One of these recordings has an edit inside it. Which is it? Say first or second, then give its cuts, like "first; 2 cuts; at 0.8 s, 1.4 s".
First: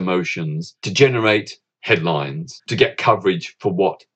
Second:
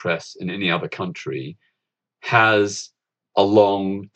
first; 3 cuts; at 0.9 s, 1.7 s, 2.6 s